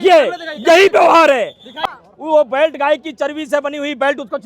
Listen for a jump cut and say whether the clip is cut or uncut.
cut